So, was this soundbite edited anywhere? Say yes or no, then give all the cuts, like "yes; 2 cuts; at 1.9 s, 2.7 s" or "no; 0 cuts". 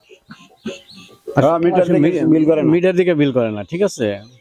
no; 0 cuts